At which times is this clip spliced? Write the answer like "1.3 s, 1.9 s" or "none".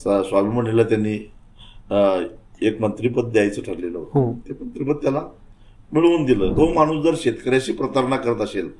6.5 s